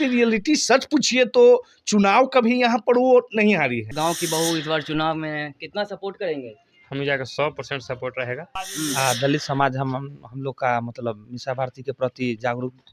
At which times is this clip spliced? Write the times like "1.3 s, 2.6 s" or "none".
3.9 s, 8.6 s